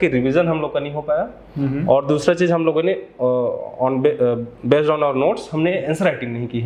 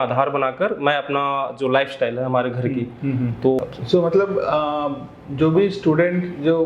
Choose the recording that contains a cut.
second; 1 cut; at 3.6 s

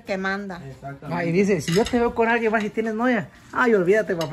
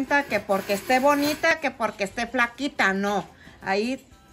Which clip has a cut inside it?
second; 1 cut; at 1.5 s

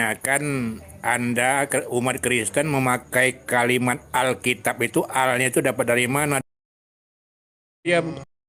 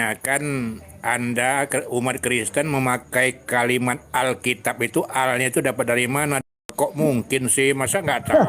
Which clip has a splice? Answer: second; 1 cut; at 6.7 s

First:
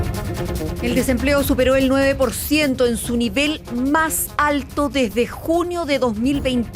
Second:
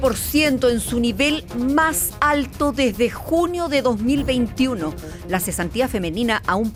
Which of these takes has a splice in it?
first; 1 cut; at 0.9 s

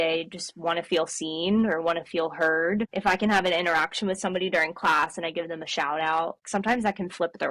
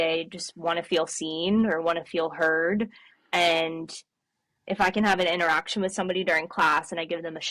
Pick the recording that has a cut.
first; 2 cuts; at 2.9 s, 6.4 s

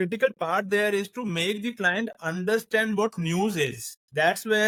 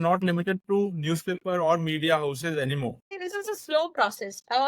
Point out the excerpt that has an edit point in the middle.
second; 1 cut; at 3.1 s

